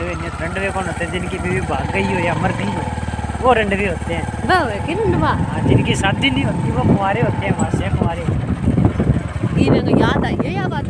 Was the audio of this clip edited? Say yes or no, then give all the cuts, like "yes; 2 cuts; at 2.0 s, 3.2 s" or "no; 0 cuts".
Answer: no; 0 cuts